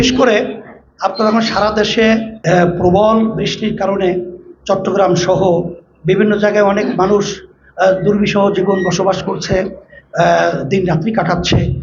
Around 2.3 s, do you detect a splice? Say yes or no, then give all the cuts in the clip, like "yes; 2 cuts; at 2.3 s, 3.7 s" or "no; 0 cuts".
yes; 1 cut; at 2.3 s